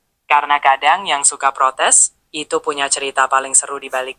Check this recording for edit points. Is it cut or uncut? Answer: uncut